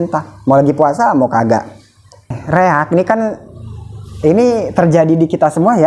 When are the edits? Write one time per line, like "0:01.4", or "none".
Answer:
0:02.4